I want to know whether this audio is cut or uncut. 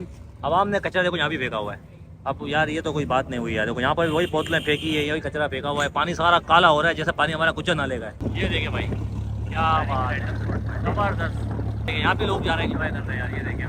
cut